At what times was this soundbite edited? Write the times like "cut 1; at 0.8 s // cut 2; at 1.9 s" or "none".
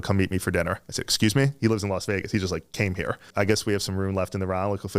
cut 1; at 3.3 s